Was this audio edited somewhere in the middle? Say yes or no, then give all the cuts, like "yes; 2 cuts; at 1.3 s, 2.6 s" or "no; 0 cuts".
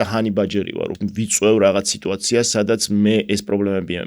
yes; 1 cut; at 0.9 s